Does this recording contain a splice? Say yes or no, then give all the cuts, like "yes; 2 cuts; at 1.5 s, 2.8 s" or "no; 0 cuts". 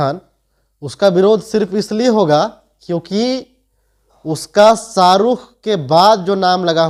no; 0 cuts